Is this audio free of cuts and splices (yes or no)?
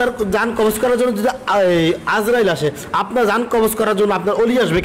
yes